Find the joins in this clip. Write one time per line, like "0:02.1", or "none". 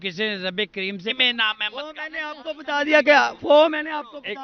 0:01.1